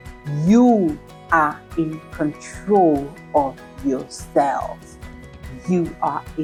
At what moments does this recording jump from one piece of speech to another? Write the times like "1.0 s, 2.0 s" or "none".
none